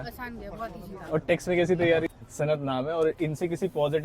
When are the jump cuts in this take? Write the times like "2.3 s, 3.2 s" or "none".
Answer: 2.1 s